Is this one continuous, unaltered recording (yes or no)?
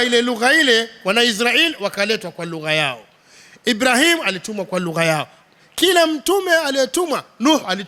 yes